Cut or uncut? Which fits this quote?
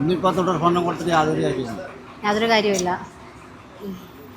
uncut